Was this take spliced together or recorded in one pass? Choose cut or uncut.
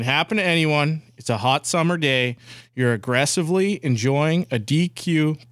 uncut